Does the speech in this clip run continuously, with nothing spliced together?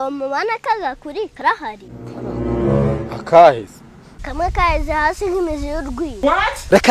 no; 1 cut; at 1.4 s

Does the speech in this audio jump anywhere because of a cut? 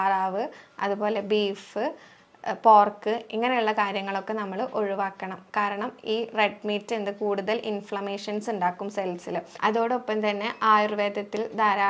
yes; 1 cut; at 9.5 s

